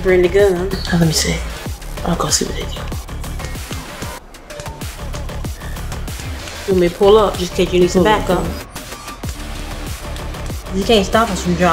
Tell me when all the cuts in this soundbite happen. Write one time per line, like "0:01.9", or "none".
none